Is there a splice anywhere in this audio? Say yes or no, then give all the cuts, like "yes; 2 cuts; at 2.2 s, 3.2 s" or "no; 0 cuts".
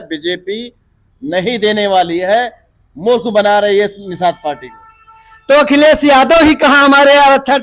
no; 0 cuts